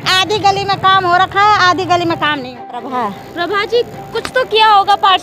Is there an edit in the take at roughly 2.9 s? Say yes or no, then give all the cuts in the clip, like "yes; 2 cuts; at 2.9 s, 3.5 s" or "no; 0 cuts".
yes; 1 cut; at 2.9 s